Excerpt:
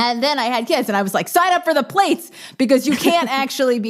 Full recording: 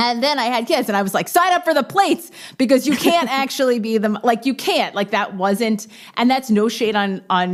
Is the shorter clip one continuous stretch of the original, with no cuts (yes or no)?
yes